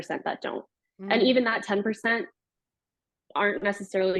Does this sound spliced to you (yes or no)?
no